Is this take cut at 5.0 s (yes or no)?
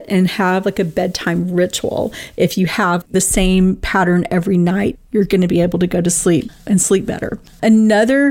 no